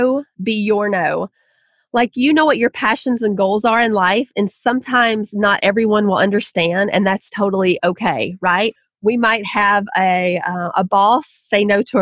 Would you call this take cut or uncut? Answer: uncut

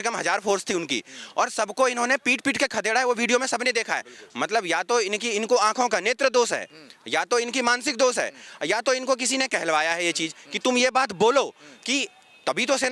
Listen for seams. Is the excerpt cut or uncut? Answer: uncut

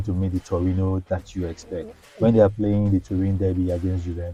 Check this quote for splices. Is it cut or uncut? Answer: uncut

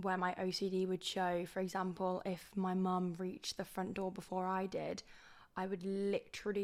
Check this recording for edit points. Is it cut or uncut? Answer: uncut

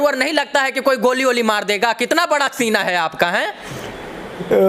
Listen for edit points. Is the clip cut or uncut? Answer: uncut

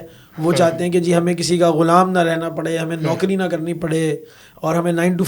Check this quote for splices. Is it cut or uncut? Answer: uncut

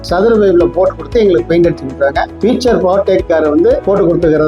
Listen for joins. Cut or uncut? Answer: cut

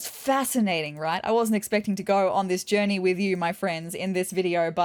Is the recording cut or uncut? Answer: uncut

